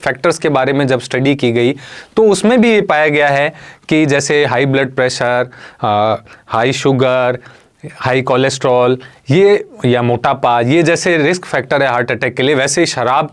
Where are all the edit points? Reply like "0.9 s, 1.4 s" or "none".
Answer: none